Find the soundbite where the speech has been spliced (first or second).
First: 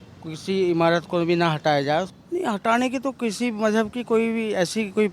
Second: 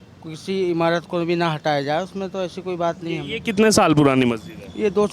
first